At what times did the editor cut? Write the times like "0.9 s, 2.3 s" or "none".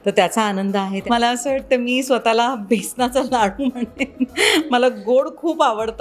1.0 s

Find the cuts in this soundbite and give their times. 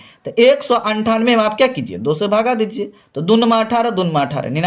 none

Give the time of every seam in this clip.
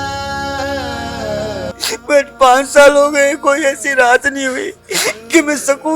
1.8 s

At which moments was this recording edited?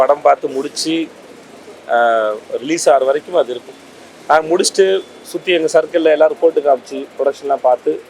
none

